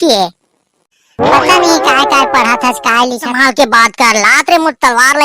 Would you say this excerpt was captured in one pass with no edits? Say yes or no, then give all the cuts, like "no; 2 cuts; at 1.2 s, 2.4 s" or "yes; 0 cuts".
no; 1 cut; at 3.2 s